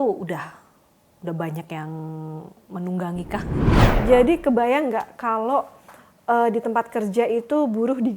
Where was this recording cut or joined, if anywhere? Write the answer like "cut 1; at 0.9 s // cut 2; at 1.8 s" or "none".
cut 1; at 3.8 s